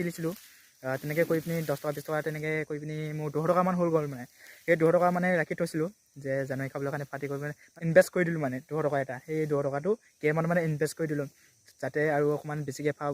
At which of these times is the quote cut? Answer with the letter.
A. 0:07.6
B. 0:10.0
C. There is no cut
A